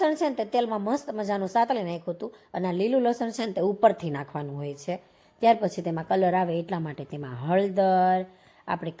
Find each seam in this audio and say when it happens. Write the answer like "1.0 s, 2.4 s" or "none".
none